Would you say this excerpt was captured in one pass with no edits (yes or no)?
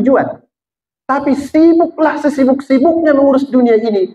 yes